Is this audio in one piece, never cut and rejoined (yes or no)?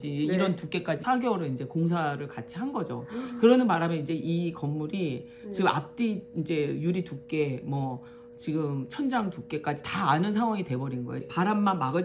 yes